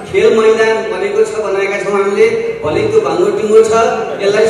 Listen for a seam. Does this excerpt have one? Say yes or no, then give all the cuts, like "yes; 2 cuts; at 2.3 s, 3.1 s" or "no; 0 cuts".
no; 0 cuts